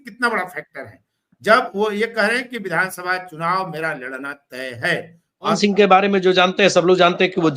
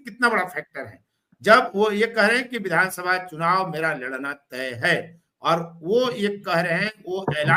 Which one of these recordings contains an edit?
first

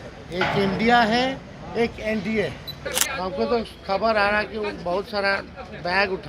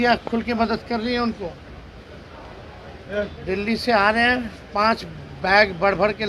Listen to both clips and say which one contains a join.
first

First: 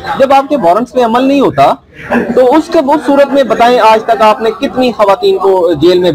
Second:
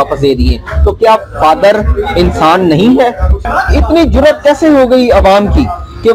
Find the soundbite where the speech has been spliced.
second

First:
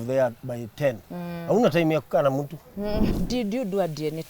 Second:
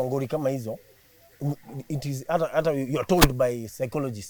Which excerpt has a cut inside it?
first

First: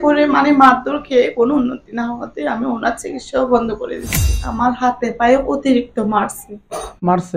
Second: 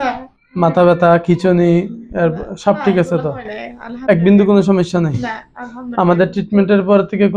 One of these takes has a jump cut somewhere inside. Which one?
first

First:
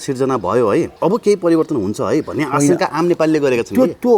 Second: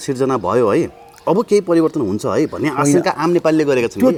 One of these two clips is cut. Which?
first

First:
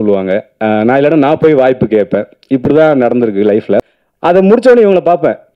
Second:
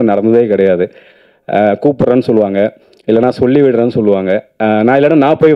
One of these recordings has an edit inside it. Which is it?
first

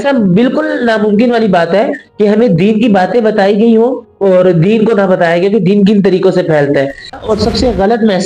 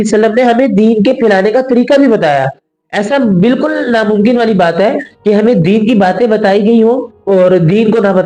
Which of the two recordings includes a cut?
first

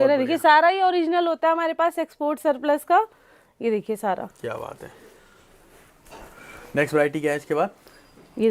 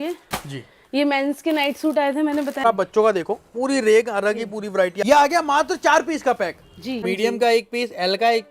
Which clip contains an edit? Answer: second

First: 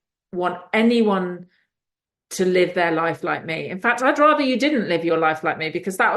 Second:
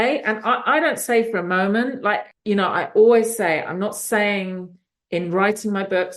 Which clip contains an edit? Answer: second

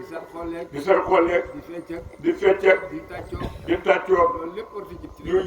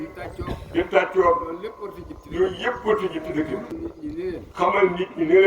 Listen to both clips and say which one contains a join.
second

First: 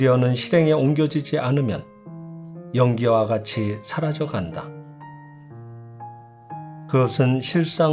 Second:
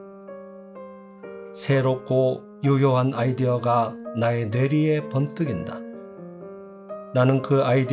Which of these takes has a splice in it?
second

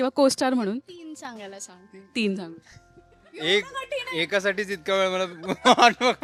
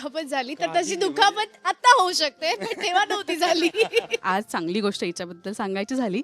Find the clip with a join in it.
second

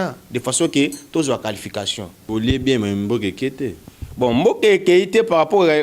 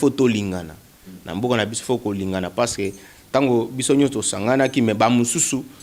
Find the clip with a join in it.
first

